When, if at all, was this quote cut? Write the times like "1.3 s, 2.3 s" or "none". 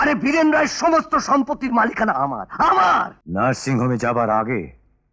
3.2 s

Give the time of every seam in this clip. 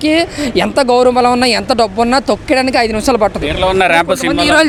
none

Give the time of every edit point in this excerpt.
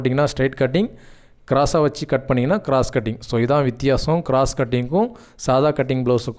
none

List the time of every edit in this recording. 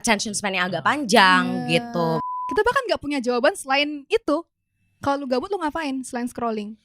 2.3 s

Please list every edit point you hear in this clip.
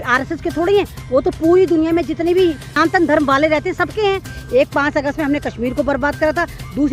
2.7 s, 4.4 s

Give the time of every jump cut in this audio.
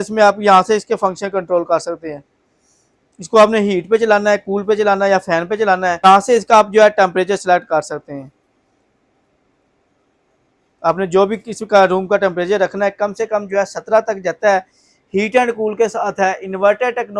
6.0 s

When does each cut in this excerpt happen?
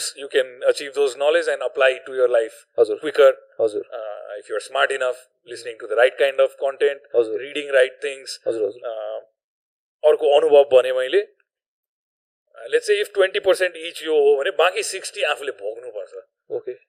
none

